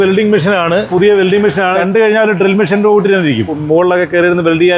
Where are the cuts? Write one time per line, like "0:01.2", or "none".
0:00.9
0:01.8
0:03.6